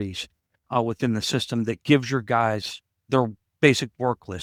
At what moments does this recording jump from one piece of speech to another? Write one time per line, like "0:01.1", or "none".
none